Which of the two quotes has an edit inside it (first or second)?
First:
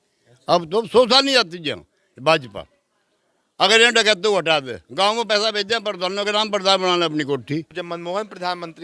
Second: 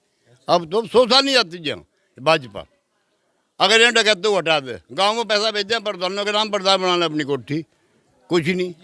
first